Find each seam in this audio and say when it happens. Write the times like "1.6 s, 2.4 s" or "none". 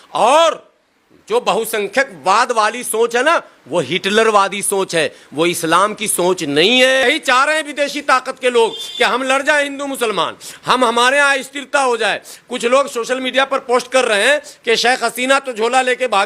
7.0 s